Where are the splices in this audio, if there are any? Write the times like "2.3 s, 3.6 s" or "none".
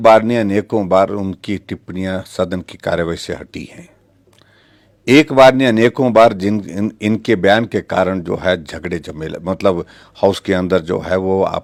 none